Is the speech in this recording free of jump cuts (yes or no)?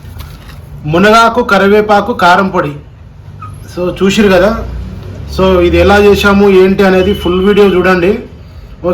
yes